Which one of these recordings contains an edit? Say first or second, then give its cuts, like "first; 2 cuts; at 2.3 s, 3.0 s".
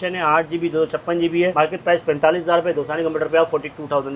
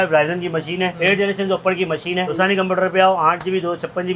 second; 2 cuts; at 0.9 s, 2.3 s